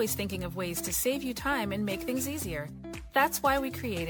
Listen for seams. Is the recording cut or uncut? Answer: uncut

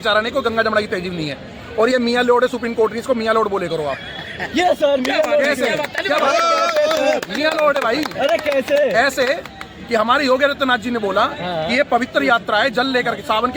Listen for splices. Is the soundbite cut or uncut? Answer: uncut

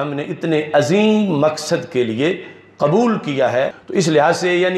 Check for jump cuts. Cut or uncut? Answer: uncut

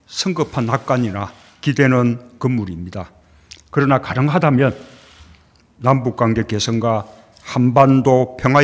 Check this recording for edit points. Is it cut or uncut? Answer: uncut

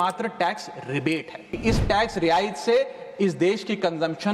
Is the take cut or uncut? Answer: cut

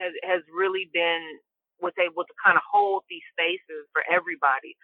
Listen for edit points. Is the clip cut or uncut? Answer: cut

